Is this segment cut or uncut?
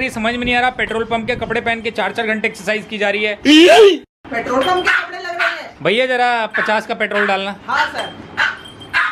cut